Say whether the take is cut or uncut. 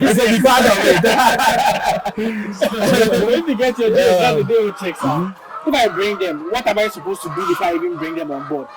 uncut